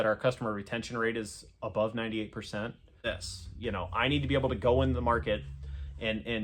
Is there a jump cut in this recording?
yes; 1 cut; at 3.0 s

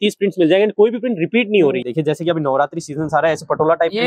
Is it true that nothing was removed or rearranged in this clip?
no; 1 cut; at 1.8 s

